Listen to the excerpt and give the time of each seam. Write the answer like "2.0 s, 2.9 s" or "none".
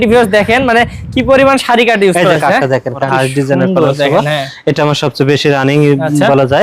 3.0 s

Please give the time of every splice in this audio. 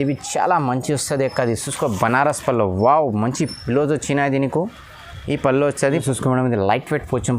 5.9 s

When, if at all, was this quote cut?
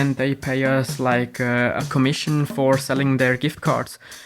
1.8 s

